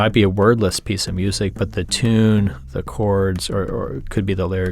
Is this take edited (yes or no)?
yes